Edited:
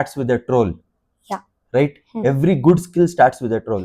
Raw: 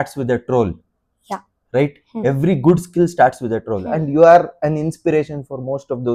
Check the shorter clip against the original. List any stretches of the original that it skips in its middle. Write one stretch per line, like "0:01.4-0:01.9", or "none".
none